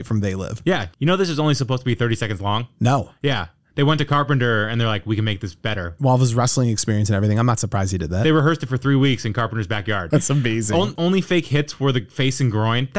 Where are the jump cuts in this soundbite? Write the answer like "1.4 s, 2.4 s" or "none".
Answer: 5.9 s, 10.0 s, 10.9 s